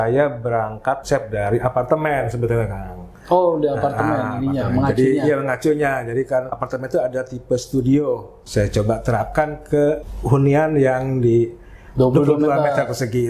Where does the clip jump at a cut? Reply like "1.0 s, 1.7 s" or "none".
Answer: 1.0 s, 6.6 s, 8.3 s, 10.1 s

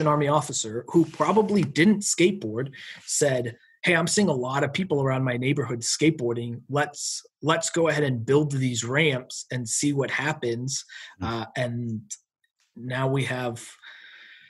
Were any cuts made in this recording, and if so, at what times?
none

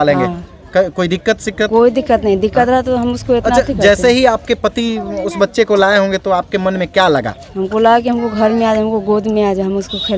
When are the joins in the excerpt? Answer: none

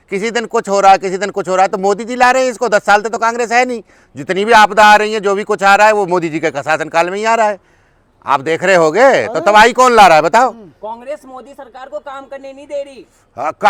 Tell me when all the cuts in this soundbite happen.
none

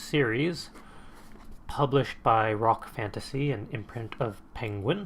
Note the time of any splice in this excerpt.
2.6 s

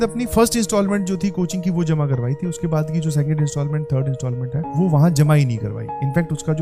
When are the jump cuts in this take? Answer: none

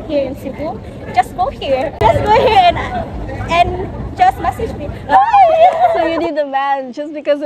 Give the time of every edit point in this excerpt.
2.0 s, 6.0 s

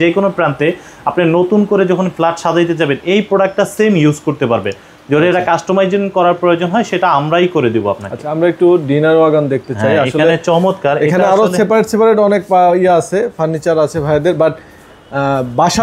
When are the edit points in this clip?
none

